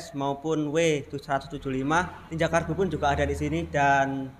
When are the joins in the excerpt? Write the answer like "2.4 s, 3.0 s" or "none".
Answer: 2.2 s